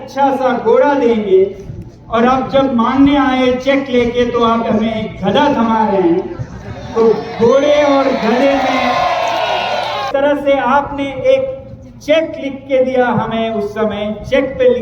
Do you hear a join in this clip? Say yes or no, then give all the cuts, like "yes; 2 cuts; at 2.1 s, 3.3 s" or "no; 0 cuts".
yes; 1 cut; at 10.1 s